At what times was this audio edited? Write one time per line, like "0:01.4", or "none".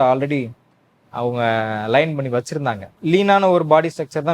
0:02.9